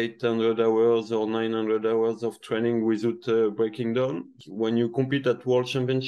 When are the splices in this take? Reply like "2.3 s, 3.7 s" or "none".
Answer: 4.4 s